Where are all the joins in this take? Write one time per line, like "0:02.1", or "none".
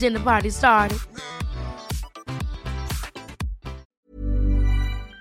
0:03.9